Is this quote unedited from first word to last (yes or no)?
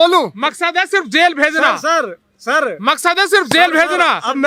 yes